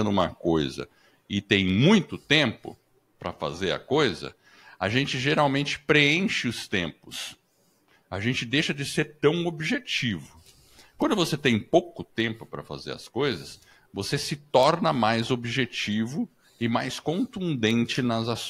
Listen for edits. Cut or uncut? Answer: uncut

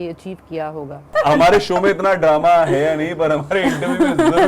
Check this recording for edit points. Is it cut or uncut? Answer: cut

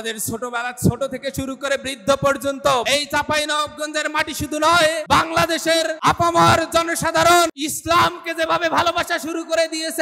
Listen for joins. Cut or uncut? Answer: cut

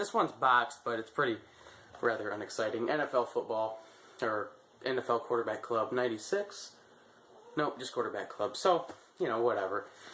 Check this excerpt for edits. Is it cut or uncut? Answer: cut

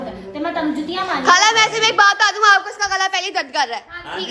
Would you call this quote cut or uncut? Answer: uncut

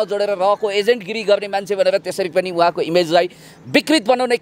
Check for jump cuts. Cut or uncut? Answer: uncut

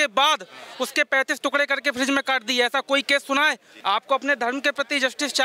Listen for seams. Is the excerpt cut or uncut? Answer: cut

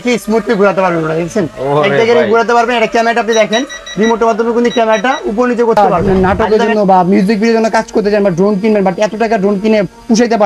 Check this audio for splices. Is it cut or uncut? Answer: cut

